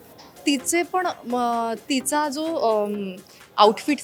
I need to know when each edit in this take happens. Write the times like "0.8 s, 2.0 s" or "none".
none